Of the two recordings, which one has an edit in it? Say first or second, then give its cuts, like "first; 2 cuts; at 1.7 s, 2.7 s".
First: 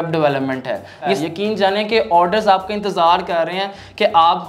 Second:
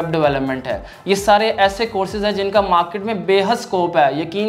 first; 1 cut; at 1.2 s